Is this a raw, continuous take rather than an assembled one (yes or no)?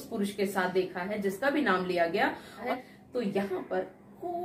no